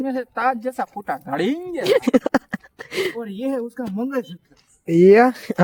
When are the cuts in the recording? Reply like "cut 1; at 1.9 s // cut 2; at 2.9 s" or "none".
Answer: none

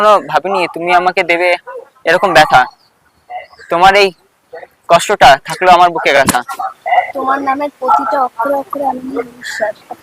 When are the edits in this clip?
cut 1; at 6.2 s

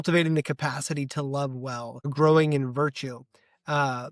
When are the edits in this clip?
cut 1; at 2.1 s

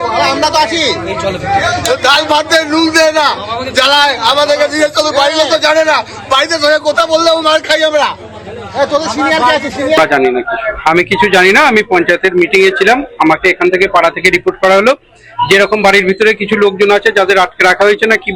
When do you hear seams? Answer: cut 1; at 10.0 s

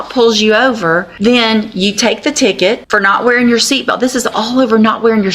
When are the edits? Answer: cut 1; at 1.1 s // cut 2; at 2.8 s

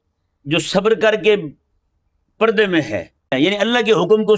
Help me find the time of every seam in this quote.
cut 1; at 3.3 s

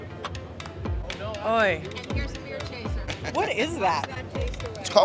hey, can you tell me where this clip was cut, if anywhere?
none

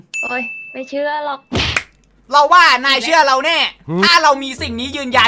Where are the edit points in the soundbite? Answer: cut 1; at 1.7 s

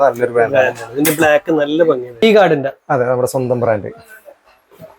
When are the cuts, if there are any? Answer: cut 1; at 2.2 s

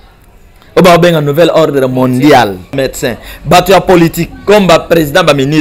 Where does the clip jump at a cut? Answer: cut 1; at 2.7 s

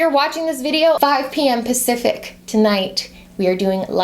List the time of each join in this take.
cut 1; at 1.0 s

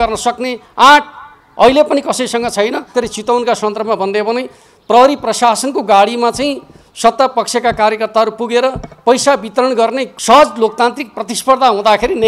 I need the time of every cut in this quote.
cut 1; at 2.9 s // cut 2; at 10.0 s

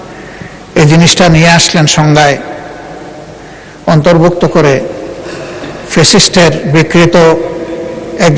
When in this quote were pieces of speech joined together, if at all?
none

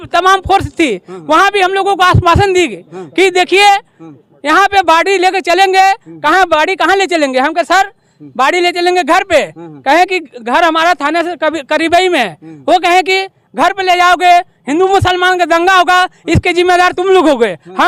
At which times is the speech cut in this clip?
none

